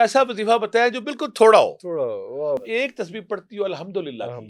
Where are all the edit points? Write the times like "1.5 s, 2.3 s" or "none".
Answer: 2.6 s